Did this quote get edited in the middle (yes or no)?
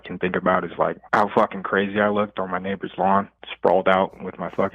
yes